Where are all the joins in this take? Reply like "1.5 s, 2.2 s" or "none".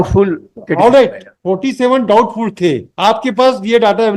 none